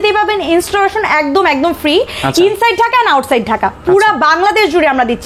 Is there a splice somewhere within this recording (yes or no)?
no